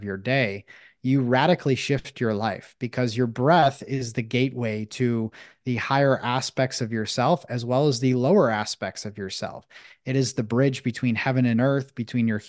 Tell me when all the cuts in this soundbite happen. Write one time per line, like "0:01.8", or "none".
none